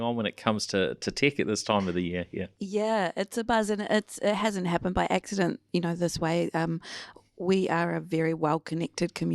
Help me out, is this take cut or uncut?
uncut